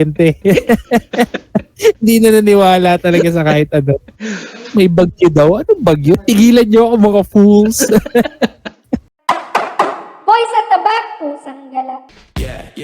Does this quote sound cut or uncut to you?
cut